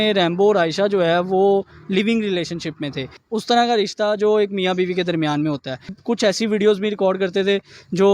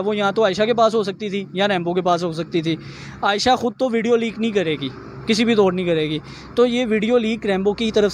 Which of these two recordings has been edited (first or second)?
first